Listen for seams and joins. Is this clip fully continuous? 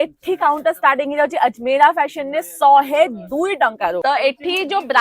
no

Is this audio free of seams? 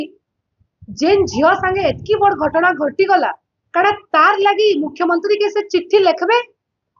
yes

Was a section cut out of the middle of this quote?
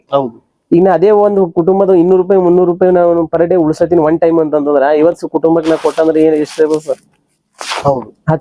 no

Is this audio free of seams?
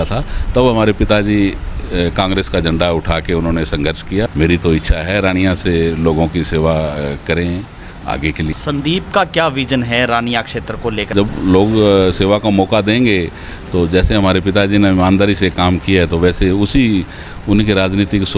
no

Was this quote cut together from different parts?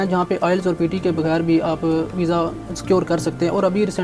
no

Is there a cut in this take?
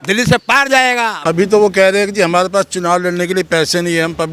yes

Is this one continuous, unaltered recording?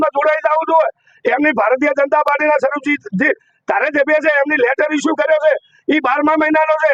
yes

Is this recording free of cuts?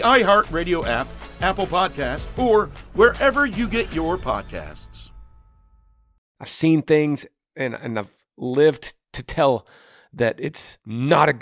no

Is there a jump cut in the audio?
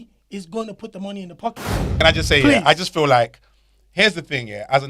yes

